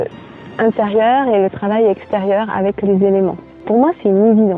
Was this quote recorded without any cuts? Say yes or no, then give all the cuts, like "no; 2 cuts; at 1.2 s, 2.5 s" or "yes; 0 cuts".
no; 1 cut; at 3.5 s